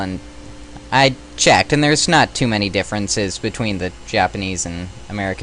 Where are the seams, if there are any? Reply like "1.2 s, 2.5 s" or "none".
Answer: none